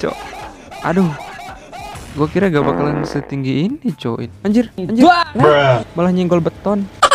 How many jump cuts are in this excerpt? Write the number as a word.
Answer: one